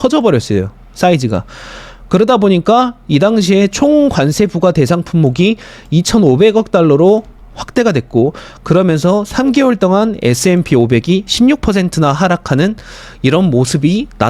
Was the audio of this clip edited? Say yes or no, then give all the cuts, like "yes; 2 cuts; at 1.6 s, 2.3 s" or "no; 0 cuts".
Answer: no; 0 cuts